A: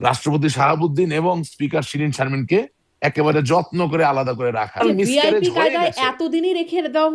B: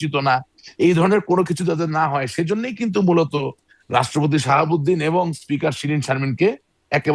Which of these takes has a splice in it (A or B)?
A